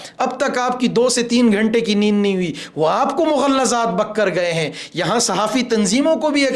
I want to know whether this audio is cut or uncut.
uncut